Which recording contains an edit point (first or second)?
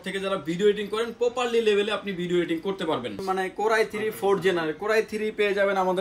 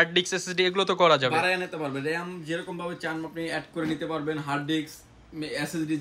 first